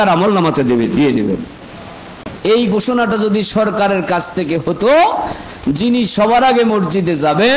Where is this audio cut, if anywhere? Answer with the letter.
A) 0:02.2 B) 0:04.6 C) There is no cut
A